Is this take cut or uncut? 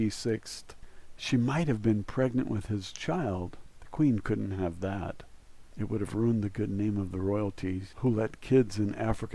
uncut